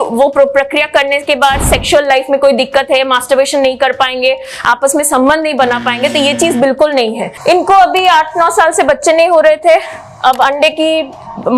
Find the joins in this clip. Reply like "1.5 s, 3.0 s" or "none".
7.3 s